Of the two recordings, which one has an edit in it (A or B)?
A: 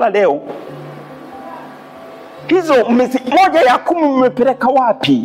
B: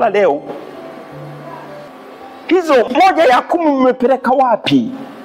B